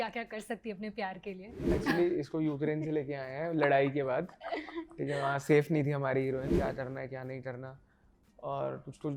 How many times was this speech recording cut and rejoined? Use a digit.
2